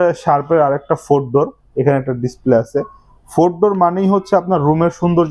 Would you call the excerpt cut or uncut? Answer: uncut